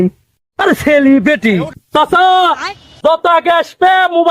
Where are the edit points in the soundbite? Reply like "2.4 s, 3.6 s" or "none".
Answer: 1.7 s